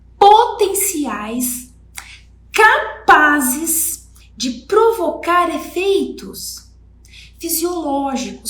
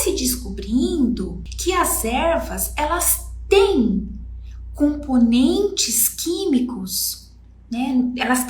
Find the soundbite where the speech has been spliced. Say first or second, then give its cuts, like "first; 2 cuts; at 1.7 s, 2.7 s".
second; 1 cut; at 1.4 s